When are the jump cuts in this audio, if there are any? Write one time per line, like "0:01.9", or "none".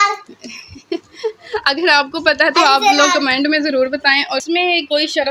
0:04.4